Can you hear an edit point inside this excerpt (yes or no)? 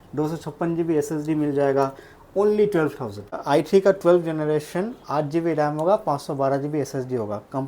yes